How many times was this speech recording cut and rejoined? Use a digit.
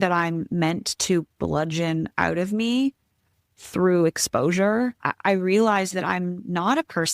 1